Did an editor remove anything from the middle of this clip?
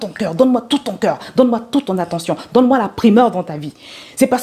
no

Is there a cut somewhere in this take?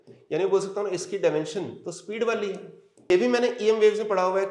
yes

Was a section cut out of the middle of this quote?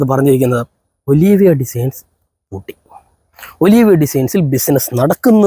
no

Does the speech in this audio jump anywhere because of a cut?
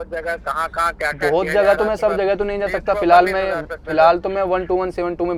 no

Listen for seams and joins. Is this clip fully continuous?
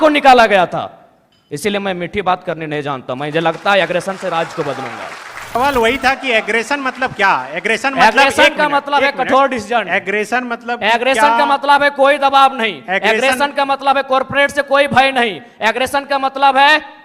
no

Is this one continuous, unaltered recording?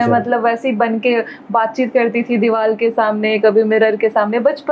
yes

